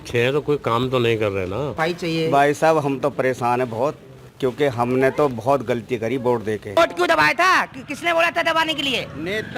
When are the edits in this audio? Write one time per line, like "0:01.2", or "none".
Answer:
0:01.8
0:06.8